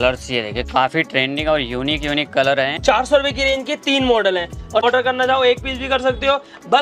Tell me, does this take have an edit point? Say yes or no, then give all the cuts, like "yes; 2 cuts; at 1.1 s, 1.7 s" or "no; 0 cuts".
yes; 2 cuts; at 2.8 s, 4.8 s